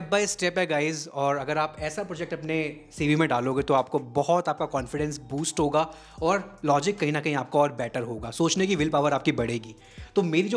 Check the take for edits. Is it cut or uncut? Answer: uncut